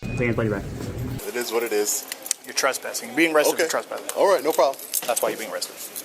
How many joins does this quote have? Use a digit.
1